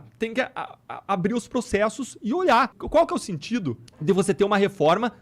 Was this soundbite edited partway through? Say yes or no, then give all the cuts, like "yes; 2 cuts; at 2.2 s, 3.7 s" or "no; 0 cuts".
yes; 2 cuts; at 2.8 s, 3.9 s